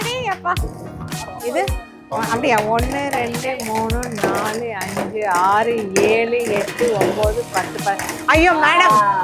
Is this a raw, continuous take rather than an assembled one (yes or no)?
yes